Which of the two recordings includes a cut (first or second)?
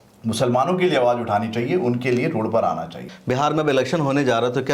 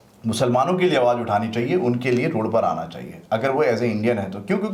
first